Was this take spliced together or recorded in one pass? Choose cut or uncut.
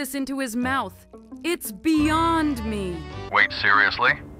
cut